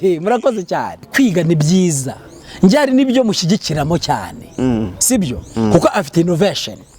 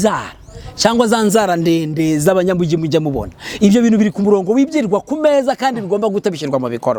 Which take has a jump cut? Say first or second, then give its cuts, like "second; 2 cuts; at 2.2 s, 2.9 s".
first; 1 cut; at 1.1 s